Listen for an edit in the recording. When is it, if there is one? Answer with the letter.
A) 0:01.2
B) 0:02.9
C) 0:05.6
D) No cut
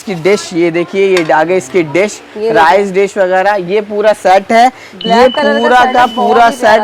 D